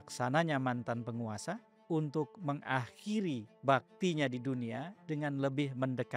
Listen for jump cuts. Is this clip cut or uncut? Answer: cut